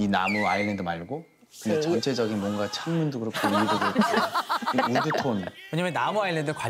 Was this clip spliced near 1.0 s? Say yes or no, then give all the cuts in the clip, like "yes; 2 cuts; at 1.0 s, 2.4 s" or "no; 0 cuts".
no; 0 cuts